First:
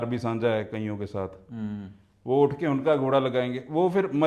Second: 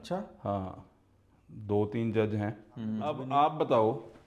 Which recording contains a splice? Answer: second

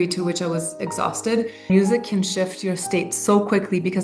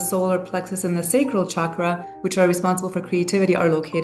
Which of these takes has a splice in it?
first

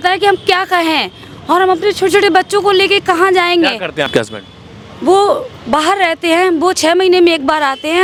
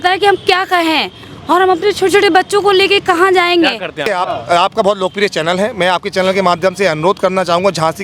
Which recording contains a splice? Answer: second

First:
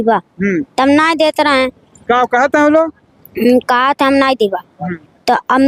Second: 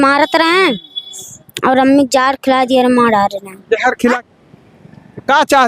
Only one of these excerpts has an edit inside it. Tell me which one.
second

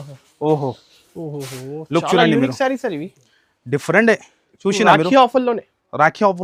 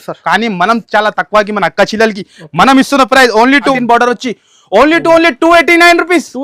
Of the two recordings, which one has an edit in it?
second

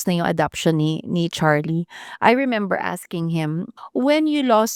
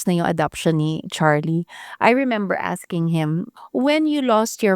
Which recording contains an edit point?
second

